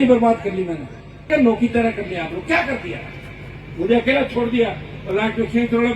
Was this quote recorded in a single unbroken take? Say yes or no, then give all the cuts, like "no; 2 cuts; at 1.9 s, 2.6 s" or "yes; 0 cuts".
no; 1 cut; at 1.3 s